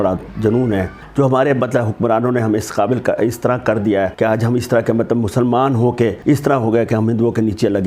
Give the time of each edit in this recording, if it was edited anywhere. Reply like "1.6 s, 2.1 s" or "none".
1.0 s, 4.1 s, 6.2 s